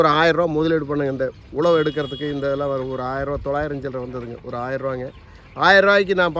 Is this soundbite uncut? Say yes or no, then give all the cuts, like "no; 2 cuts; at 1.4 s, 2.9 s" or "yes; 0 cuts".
yes; 0 cuts